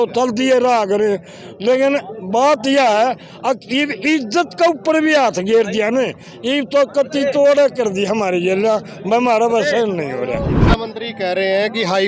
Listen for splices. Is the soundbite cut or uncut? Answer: cut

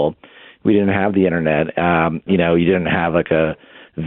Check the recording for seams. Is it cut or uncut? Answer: cut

